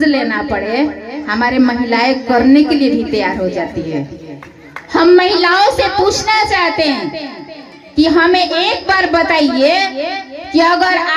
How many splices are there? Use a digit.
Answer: 0